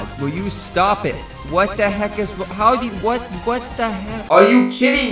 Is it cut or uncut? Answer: cut